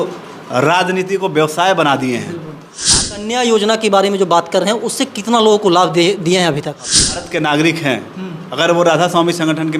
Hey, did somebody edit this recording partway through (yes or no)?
yes